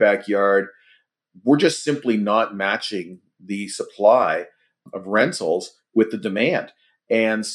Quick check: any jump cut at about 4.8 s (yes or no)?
yes